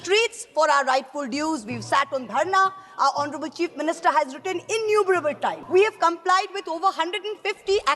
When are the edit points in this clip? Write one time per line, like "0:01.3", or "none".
0:05.6